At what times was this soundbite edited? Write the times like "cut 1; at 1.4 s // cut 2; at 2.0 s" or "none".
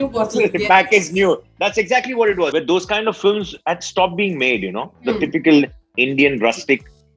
cut 1; at 2.5 s